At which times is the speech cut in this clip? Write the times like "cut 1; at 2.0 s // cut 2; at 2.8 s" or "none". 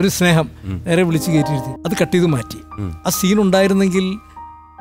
cut 1; at 1.7 s